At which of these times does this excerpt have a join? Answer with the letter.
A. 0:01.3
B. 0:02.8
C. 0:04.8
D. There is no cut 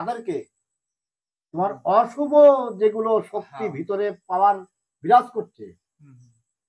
D